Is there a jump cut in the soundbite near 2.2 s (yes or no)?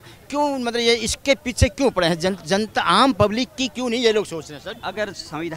no